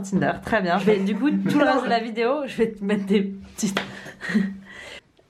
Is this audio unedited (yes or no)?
yes